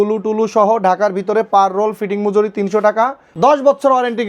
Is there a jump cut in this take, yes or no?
yes